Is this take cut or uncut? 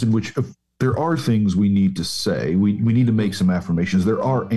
uncut